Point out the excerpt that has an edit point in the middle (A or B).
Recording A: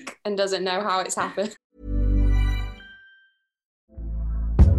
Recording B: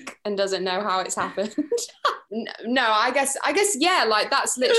A